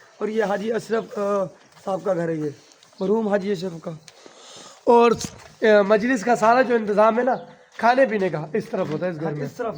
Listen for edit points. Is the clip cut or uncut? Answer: uncut